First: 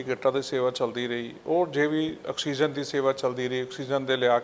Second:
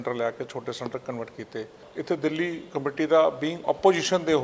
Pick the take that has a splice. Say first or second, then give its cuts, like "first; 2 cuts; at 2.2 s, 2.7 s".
second; 1 cut; at 1.8 s